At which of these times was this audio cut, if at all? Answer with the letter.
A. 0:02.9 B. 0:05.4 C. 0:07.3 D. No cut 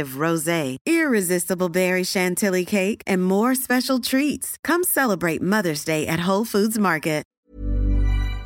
C